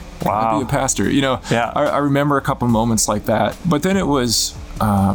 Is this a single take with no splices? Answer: no; 1 cut; at 3.6 s

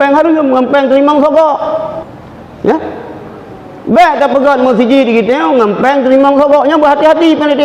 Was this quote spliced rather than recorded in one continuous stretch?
yes; 1 cut; at 2.1 s

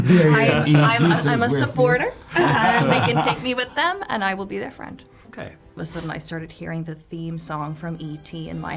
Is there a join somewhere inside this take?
yes; 1 cut; at 5.8 s

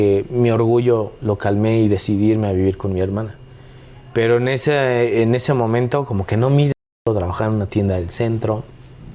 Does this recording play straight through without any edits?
no; 1 cut; at 7.0 s

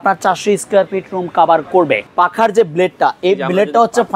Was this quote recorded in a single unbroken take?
no; 1 cut; at 2.1 s

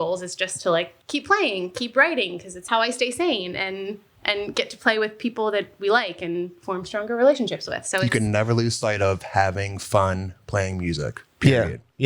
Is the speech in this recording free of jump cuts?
no; 2 cuts; at 0.9 s, 2.6 s

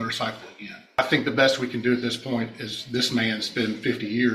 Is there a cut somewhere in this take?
yes; 1 cut; at 1.0 s

